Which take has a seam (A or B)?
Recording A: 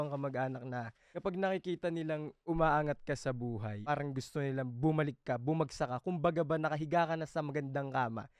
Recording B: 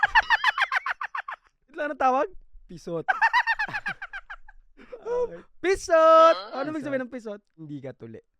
A